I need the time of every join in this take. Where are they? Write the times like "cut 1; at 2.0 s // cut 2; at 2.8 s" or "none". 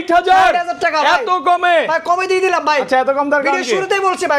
none